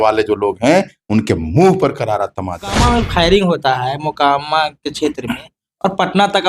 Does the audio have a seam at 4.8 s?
no; 1 cut; at 2.8 s

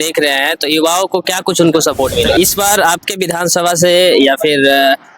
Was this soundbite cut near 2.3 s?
yes; 1 cut; at 2.3 s

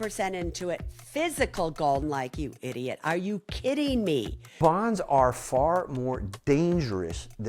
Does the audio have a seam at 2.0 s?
yes; 2 cuts; at 2.0 s, 4.5 s

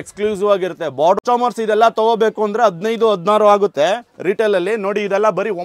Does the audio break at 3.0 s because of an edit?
no; 1 cut; at 1.2 s

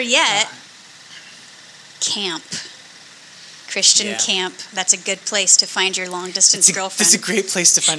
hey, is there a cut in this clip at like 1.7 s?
no; 0 cuts

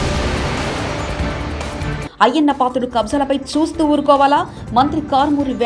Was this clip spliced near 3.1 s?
no; 1 cut; at 1.9 s

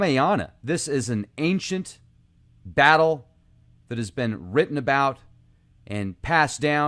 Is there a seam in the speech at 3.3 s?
yes; 1 cut; at 3.3 s

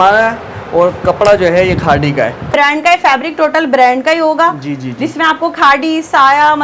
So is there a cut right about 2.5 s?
yes; 1 cut; at 2.5 s

